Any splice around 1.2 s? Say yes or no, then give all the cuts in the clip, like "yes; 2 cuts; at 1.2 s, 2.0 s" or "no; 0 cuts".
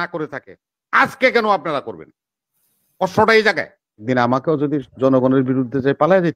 no; 1 cut; at 4.0 s